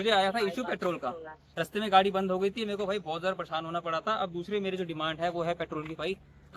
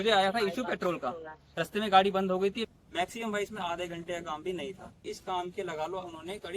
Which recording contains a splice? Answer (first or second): second